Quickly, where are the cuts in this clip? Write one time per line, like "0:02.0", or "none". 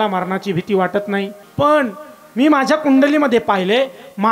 0:01.4